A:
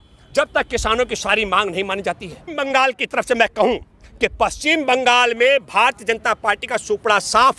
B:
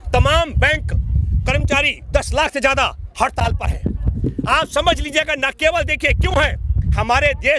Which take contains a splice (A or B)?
A